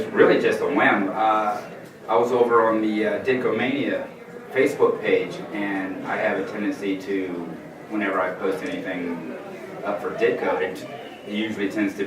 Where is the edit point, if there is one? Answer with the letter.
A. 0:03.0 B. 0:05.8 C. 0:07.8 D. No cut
B